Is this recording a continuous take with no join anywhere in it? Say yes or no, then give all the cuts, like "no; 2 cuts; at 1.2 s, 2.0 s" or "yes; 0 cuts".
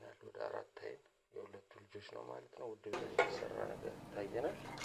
no; 1 cut; at 2.8 s